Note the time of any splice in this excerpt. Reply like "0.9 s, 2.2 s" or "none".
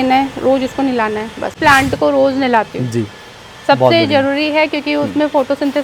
1.6 s